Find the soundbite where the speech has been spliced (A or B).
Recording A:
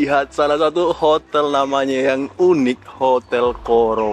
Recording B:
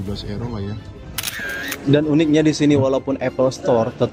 B